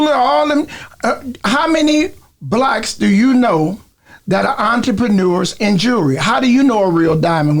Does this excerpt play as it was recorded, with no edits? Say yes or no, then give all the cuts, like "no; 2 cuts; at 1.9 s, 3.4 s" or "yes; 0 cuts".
yes; 0 cuts